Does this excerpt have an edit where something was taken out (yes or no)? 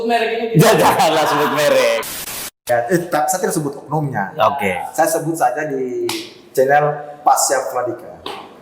yes